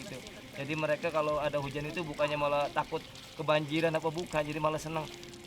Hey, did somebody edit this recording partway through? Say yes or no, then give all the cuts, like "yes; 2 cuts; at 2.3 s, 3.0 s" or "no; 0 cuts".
no; 0 cuts